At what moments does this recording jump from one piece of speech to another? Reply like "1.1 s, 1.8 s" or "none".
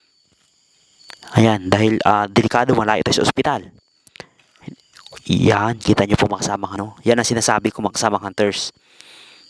6.8 s